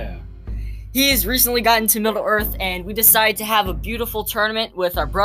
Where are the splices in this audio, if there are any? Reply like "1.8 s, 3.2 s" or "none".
none

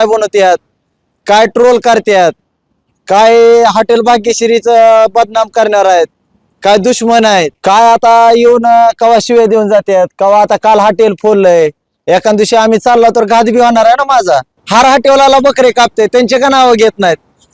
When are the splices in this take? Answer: 7.5 s, 14.6 s

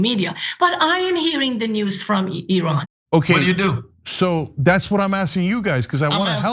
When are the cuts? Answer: 2.9 s

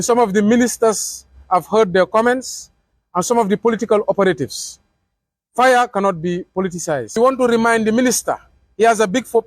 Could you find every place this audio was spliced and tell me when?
7.1 s

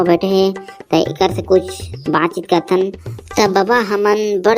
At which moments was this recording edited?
3.0 s

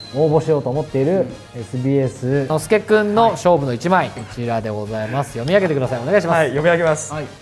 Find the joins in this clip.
2.6 s, 4.2 s

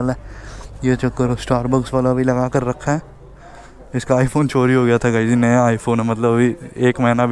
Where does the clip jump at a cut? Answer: none

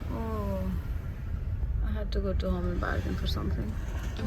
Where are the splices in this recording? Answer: none

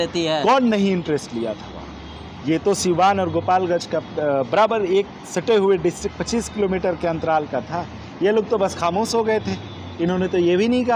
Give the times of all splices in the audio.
none

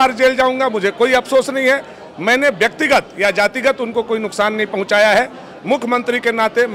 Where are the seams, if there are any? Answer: none

